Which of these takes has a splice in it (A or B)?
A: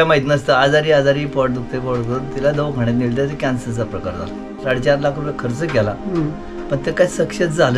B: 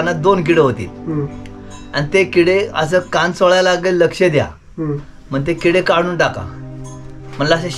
A